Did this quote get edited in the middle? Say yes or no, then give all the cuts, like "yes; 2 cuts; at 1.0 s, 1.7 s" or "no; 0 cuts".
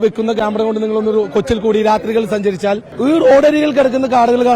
yes; 1 cut; at 2.9 s